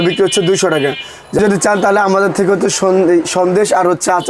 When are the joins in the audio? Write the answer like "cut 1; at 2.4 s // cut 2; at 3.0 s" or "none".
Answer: cut 1; at 1.4 s